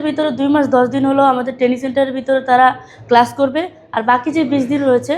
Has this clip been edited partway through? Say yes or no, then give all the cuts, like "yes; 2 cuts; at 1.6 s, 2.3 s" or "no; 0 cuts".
no; 0 cuts